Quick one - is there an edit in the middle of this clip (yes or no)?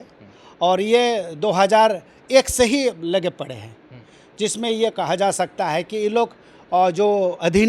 no